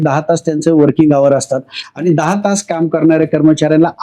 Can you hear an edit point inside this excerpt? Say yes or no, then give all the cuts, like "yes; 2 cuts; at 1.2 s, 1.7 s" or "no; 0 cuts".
no; 0 cuts